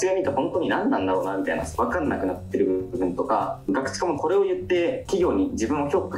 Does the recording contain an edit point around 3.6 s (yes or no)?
no